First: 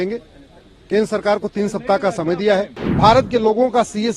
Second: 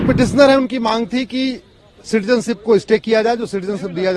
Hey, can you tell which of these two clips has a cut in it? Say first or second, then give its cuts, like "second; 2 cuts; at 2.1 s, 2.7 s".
first; 1 cut; at 2.8 s